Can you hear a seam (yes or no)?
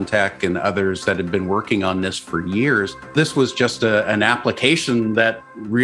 yes